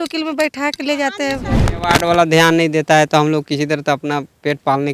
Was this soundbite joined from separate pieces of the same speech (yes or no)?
yes